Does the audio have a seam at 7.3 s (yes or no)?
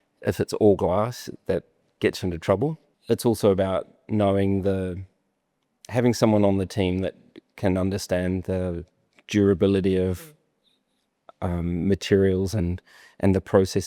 no